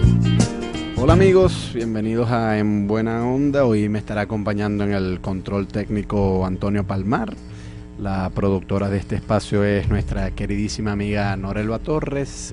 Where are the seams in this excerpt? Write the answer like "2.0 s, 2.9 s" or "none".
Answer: 11.2 s